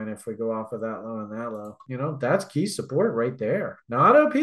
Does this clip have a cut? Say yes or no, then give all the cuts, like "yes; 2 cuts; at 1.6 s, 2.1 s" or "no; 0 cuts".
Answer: yes; 1 cut; at 1.8 s